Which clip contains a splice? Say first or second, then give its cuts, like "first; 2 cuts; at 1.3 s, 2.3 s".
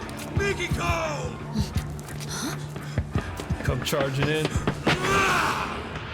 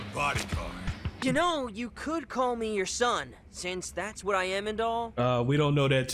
second; 1 cut; at 1.2 s